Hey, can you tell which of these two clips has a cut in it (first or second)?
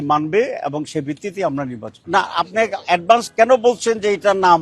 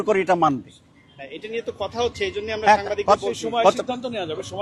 first